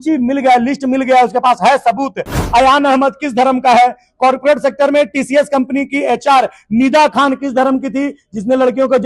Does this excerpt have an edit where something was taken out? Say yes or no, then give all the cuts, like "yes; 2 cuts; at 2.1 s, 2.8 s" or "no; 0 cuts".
yes; 1 cut; at 2.4 s